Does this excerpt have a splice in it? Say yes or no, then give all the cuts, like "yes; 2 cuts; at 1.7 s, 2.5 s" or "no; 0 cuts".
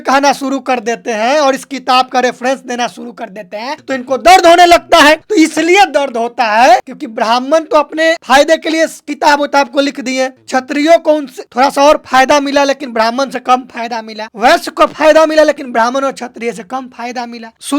yes; 3 cuts; at 3.8 s, 7.0 s, 8.2 s